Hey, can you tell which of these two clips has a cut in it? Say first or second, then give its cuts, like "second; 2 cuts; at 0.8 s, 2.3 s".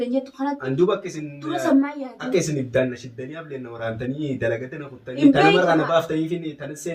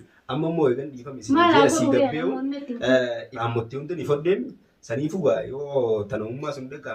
second; 1 cut; at 3.3 s